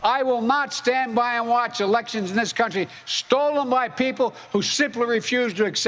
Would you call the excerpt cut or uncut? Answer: uncut